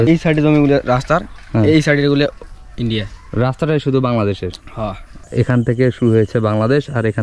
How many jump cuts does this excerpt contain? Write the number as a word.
one